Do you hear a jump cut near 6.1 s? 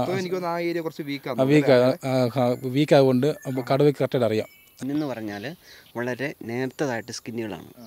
no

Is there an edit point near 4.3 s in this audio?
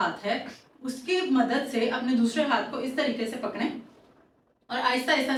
no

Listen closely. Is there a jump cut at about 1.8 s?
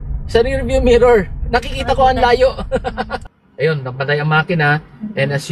no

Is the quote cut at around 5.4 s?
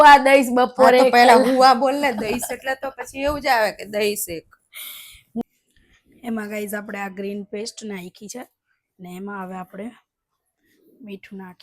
yes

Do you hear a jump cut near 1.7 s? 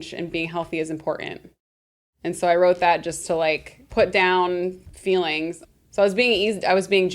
no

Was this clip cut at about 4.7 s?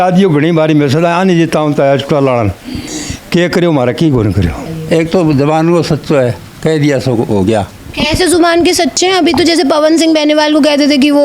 yes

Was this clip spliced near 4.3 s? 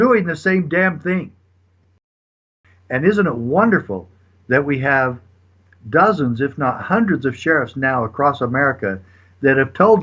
no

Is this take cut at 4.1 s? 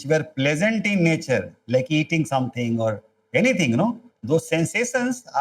yes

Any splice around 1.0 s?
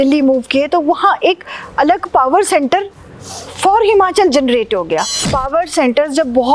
no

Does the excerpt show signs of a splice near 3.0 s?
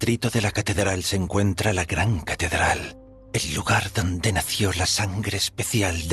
no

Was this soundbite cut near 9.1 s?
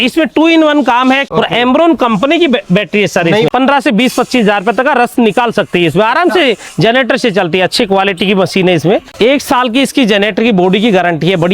yes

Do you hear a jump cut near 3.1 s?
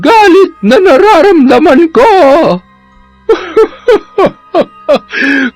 yes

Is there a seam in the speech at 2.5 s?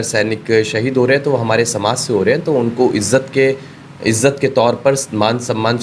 no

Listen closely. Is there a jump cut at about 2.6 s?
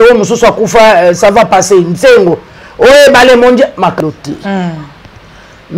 no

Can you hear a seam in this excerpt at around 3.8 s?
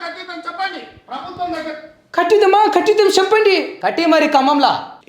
yes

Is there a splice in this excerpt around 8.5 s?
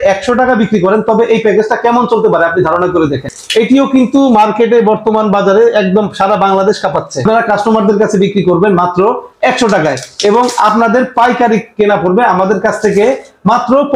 no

